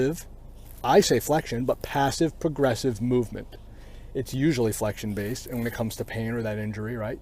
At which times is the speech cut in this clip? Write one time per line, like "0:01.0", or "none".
none

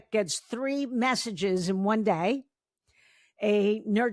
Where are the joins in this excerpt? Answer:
none

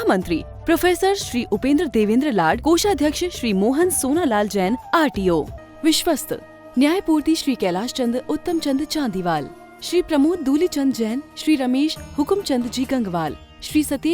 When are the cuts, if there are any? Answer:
0:05.6

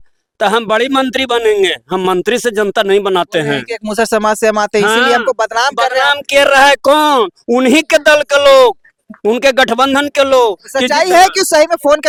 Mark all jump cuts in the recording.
none

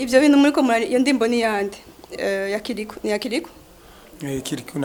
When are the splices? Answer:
none

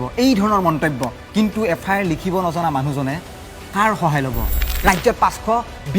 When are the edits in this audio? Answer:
0:01.2
0:04.7

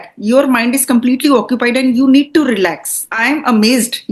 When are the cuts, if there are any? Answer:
0:03.1

